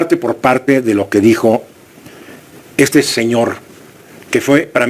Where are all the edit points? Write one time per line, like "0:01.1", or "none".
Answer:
none